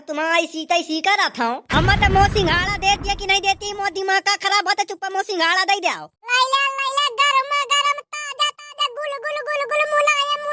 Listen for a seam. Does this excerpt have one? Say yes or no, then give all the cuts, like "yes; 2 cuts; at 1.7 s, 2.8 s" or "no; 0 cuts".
yes; 1 cut; at 1.6 s